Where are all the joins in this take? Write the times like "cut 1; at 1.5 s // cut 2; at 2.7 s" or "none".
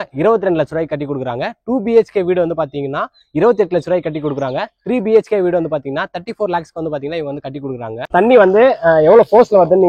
cut 1; at 8.1 s